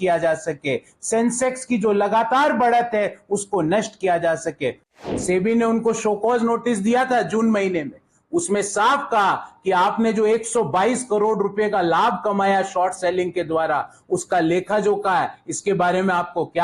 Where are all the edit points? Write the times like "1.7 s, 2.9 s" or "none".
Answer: 4.9 s